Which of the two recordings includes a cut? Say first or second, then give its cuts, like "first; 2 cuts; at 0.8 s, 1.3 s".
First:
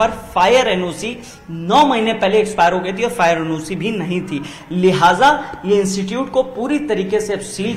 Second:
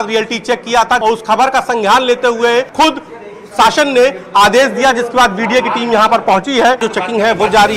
second; 3 cuts; at 1.0 s, 2.7 s, 6.9 s